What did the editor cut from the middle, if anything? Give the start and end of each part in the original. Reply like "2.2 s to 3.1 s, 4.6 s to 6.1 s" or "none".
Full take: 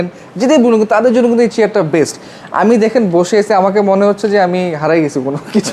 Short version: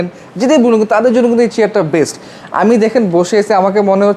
none